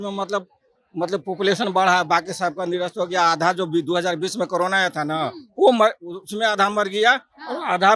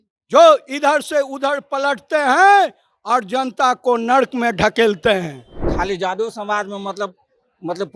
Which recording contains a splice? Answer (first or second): second